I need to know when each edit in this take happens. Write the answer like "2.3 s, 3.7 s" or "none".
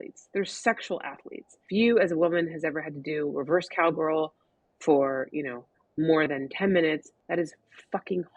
1.6 s, 7.1 s